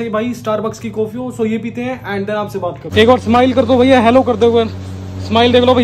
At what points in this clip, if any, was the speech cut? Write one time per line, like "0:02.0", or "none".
0:02.8